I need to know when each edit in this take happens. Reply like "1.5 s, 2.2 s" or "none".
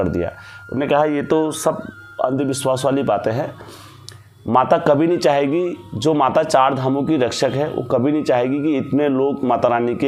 none